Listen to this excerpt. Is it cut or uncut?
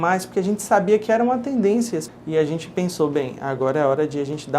cut